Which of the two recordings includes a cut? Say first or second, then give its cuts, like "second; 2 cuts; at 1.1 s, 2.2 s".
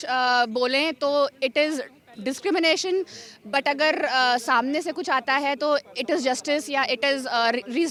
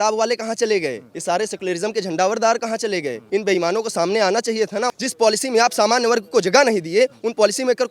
second; 3 cuts; at 1.1 s, 3.2 s, 4.9 s